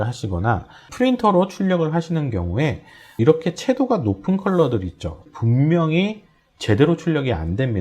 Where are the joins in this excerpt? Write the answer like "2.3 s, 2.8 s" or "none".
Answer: 0.9 s, 3.2 s, 5.2 s